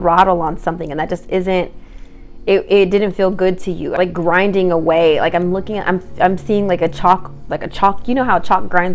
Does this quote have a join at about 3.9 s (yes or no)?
yes